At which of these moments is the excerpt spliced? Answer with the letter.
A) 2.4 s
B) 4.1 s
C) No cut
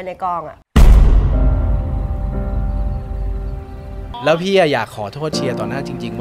B